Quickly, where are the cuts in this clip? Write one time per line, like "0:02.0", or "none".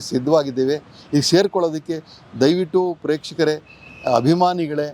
none